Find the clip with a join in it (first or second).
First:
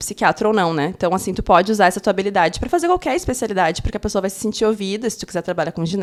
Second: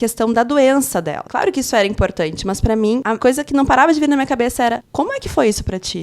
second